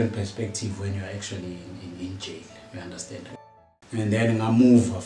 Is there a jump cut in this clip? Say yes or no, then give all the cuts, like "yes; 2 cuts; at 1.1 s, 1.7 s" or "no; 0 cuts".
yes; 1 cut; at 3.3 s